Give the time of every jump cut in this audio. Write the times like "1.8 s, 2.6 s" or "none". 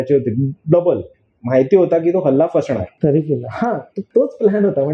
3.0 s, 3.9 s